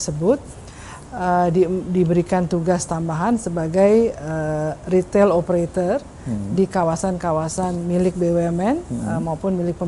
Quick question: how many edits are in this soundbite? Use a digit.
0